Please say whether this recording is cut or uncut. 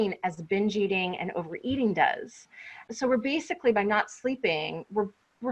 cut